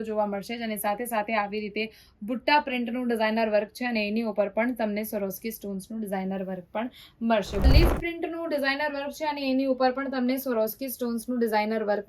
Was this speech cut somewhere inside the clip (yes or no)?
yes